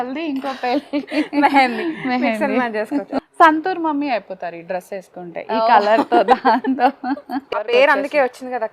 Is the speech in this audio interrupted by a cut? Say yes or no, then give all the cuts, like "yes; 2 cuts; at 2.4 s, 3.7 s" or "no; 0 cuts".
yes; 2 cuts; at 3.1 s, 7.7 s